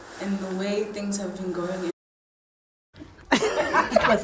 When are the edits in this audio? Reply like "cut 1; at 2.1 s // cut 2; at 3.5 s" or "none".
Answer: none